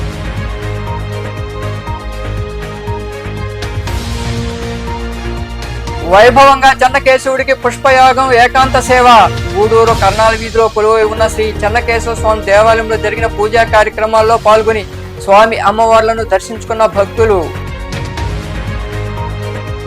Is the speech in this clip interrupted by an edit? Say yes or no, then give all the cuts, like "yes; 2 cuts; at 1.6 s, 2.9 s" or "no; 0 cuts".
yes; 1 cut; at 3.7 s